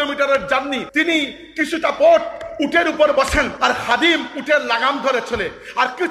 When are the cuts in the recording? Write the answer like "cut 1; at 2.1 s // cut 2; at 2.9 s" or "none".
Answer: cut 1; at 0.9 s // cut 2; at 3.5 s